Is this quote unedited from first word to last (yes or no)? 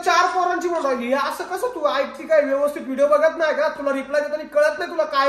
yes